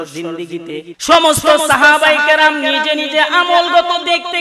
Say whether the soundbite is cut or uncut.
cut